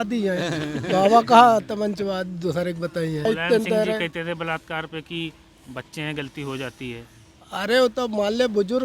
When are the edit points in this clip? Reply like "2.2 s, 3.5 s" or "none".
3.2 s